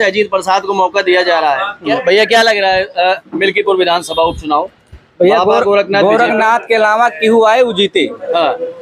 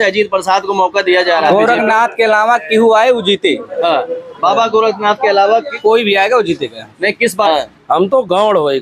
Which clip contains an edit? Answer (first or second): second